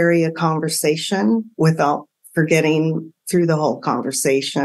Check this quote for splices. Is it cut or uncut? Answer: uncut